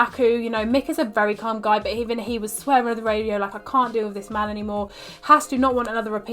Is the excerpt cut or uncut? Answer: uncut